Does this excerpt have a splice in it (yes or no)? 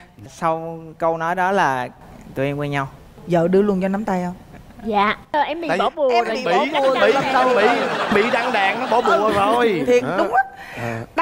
no